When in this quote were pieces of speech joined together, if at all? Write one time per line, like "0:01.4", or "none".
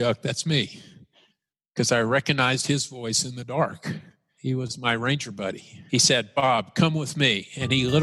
0:04.3
0:05.8